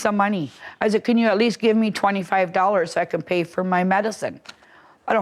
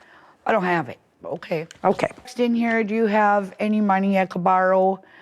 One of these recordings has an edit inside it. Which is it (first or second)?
second